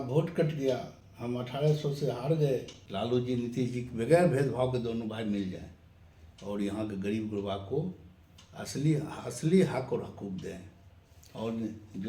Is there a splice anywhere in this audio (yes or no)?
yes